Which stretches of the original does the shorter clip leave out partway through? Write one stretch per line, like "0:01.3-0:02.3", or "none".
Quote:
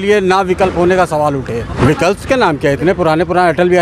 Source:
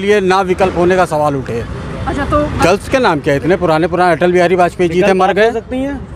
0:01.9-0:02.6